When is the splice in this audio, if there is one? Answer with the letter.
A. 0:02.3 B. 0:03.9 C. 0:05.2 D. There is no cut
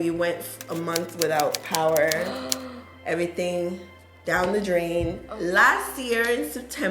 C